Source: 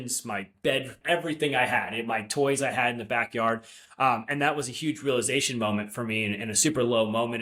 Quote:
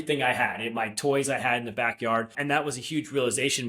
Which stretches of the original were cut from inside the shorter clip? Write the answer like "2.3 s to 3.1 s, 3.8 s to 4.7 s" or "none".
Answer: 3.7 s to 4.3 s